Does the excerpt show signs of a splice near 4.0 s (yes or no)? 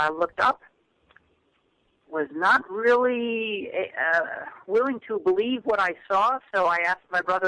yes